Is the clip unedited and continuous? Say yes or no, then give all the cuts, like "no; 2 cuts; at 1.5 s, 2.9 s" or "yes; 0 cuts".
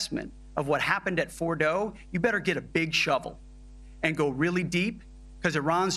yes; 0 cuts